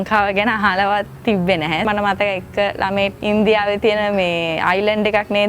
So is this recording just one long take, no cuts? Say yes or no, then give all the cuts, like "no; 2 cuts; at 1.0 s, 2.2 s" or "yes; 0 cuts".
no; 2 cuts; at 1.9 s, 3.2 s